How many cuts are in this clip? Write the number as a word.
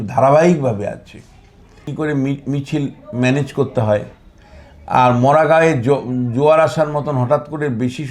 one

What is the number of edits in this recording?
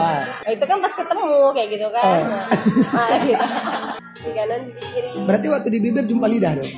one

